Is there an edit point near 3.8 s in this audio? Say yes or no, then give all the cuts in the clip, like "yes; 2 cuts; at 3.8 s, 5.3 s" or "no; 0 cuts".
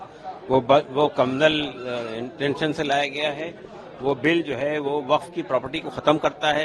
no; 0 cuts